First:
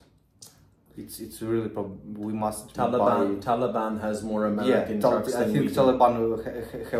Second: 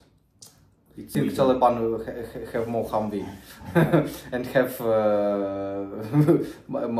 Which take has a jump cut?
second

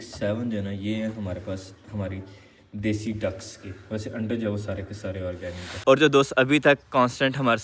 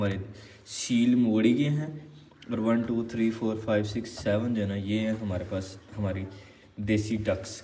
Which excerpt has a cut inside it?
first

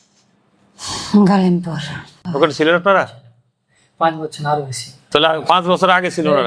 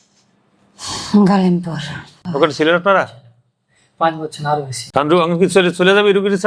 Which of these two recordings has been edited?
second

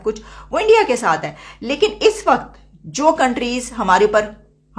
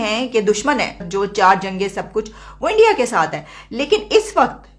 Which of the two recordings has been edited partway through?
second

